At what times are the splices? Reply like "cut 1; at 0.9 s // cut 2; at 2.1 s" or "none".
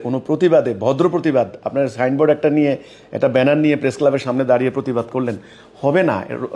none